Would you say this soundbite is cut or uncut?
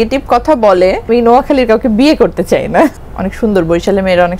cut